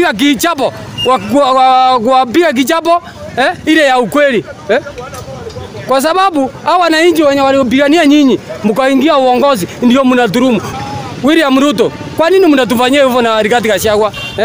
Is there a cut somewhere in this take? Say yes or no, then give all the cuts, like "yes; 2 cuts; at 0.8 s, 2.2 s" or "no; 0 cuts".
yes; 1 cut; at 10.7 s